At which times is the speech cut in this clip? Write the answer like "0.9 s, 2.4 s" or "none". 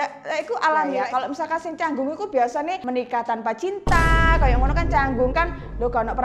1.0 s, 2.8 s

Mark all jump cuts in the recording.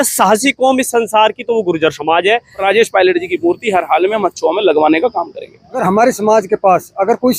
2.6 s, 5.8 s

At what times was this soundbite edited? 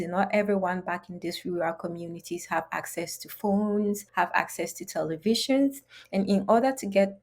4.1 s

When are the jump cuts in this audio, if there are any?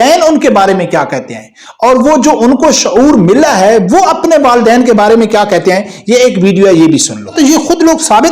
7.3 s

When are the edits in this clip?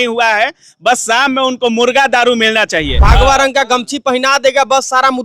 3.0 s

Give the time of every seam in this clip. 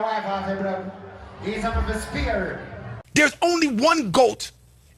3.0 s

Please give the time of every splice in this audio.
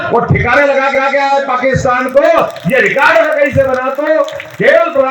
0.9 s

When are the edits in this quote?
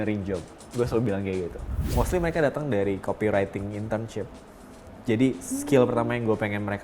1.7 s

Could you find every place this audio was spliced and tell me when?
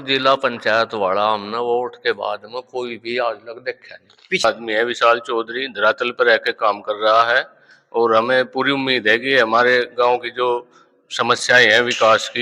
4.4 s

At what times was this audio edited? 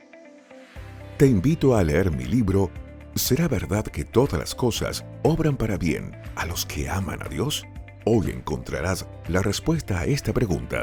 none

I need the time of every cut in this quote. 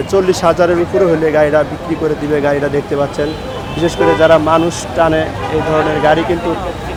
none

